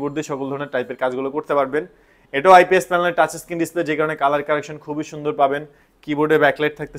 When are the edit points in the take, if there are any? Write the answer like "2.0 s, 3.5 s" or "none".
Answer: none